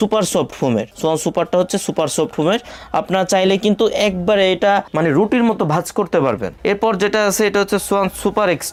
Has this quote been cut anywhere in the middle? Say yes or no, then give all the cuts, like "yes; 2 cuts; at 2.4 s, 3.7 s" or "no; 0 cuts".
no; 0 cuts